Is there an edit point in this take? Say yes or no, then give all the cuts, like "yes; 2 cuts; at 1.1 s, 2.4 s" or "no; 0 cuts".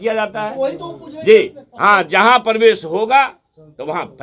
no; 0 cuts